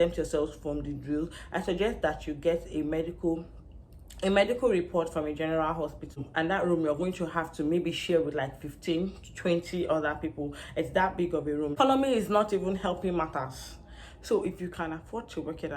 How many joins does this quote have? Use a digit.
2